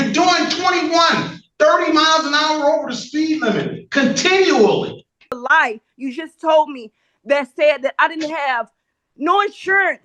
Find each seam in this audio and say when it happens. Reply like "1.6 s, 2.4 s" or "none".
5.3 s